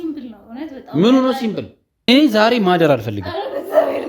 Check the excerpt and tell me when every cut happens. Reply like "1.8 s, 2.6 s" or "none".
1.9 s

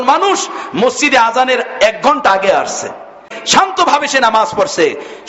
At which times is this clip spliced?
3.6 s

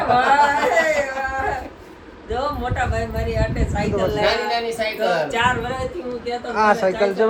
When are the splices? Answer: none

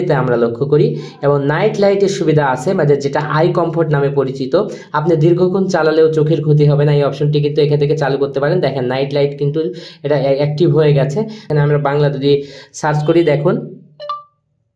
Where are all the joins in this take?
11.4 s

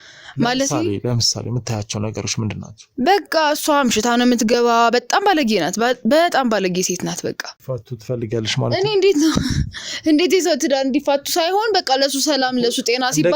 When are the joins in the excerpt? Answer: 7.5 s

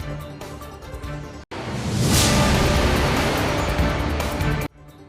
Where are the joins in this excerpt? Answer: 1.5 s

